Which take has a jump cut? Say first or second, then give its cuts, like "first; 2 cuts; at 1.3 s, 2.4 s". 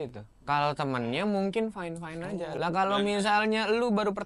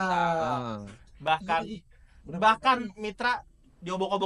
first; 1 cut; at 2.5 s